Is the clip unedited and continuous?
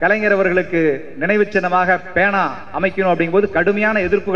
yes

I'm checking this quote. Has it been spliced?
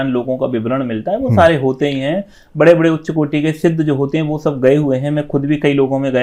no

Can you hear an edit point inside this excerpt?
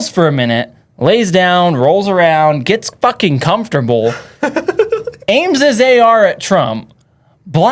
no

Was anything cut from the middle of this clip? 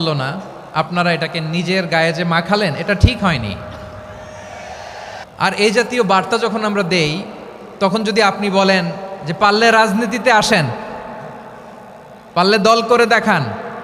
yes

